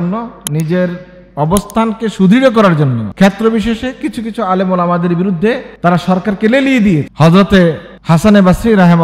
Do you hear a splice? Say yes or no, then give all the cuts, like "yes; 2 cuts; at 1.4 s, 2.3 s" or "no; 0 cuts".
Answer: yes; 3 cuts; at 3.0 s, 5.7 s, 7.1 s